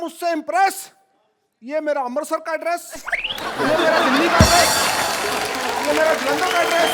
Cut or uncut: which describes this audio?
uncut